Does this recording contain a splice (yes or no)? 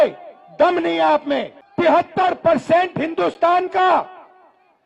yes